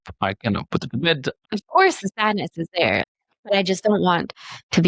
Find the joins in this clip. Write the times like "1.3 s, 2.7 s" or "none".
1.3 s, 3.0 s